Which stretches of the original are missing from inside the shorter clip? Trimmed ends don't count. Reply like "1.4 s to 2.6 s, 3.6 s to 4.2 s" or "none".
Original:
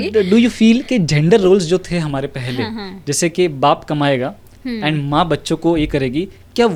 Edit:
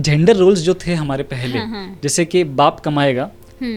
none